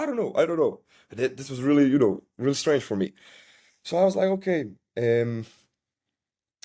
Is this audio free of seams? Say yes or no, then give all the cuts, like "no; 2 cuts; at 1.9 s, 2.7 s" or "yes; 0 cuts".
yes; 0 cuts